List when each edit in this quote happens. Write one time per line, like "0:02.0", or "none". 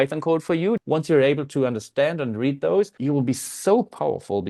0:00.8
0:03.0